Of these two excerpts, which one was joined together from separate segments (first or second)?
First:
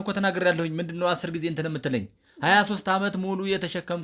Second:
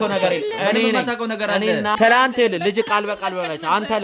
second